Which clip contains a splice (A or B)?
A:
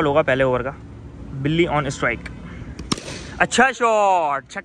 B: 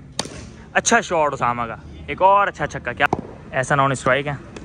B